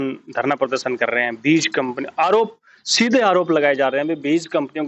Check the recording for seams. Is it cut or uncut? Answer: uncut